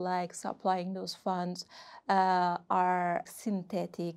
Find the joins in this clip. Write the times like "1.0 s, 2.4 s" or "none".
3.3 s